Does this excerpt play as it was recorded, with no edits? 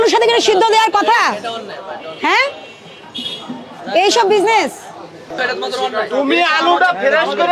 no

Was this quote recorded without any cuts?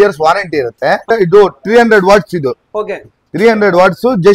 no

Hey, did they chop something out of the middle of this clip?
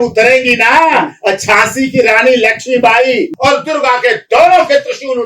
yes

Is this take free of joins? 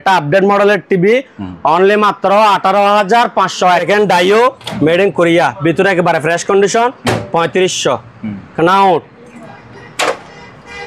no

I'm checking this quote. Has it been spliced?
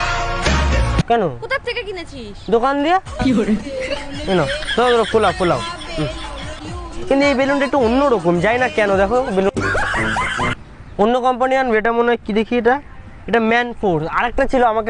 yes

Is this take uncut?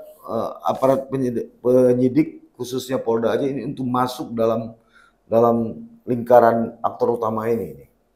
yes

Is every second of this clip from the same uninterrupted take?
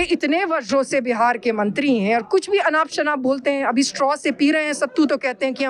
yes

